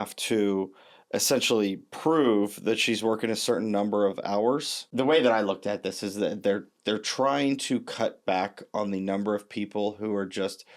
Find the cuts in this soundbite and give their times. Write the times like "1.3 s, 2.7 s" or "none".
4.8 s